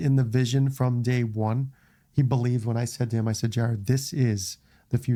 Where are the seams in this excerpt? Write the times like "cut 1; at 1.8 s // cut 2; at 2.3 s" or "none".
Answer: none